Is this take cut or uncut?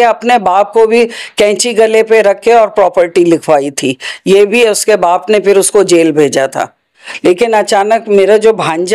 cut